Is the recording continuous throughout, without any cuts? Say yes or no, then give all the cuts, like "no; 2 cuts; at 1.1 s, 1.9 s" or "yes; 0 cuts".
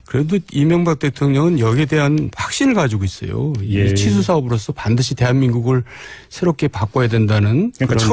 no; 1 cut; at 5.1 s